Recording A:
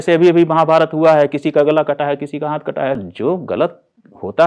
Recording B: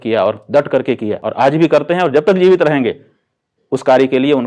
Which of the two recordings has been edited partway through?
A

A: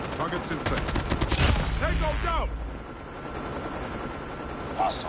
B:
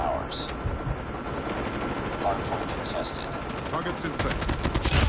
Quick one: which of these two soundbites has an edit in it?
B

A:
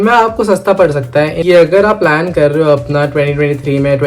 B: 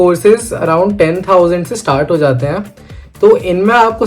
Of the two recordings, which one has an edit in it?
A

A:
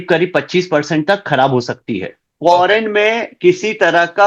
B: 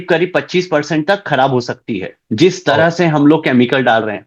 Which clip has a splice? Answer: A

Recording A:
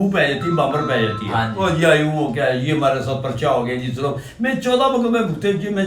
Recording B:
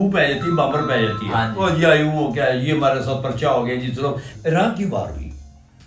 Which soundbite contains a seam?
B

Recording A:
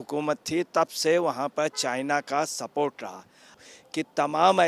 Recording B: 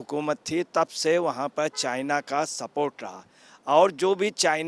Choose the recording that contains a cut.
A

